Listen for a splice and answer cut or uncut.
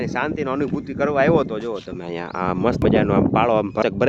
uncut